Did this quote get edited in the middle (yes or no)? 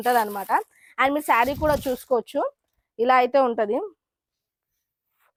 no